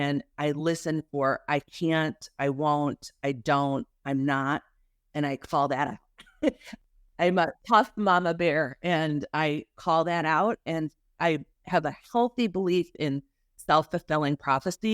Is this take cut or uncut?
cut